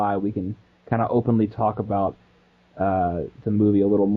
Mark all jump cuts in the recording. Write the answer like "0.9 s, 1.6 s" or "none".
1.7 s